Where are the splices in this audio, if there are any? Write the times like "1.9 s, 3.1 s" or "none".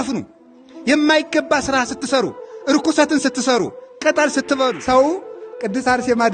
4.8 s